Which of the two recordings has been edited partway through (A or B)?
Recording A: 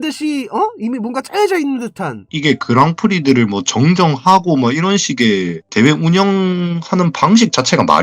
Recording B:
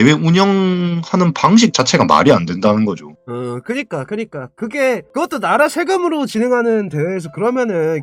A